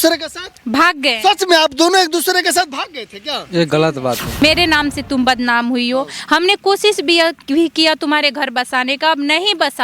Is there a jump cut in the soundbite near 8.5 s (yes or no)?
no